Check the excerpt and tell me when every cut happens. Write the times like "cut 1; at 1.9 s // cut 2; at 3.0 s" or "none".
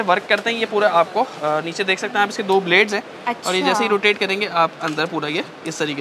none

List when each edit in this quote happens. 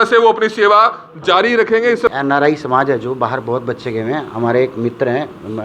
cut 1; at 2.0 s

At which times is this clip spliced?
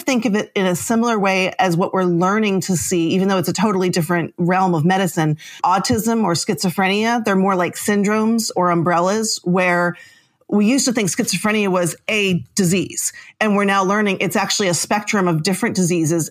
cut 1; at 5.6 s

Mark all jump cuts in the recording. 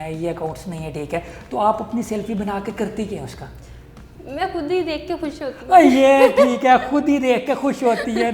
none

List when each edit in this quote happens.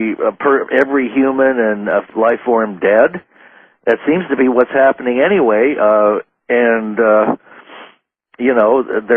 cut 1; at 7.3 s

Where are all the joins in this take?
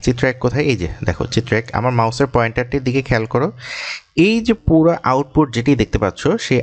none

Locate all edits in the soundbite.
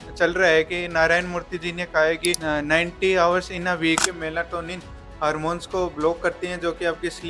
cut 1; at 2.4 s // cut 2; at 4.0 s

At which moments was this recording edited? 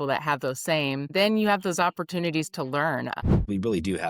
cut 1; at 1.1 s // cut 2; at 3.2 s

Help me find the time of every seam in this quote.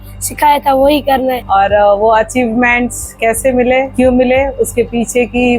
cut 1; at 1.4 s

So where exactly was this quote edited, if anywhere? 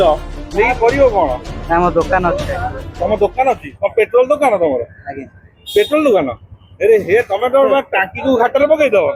none

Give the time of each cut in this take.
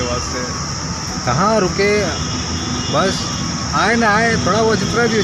none

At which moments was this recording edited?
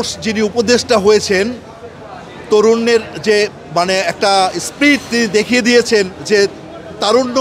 none

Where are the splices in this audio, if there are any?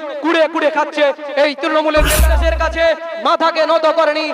cut 1; at 2.2 s

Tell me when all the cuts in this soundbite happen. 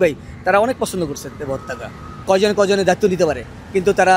cut 1; at 2.1 s

